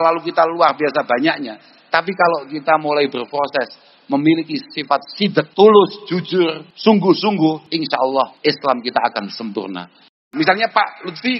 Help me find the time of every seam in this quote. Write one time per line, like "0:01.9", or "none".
0:05.5
0:06.6
0:08.0
0:10.2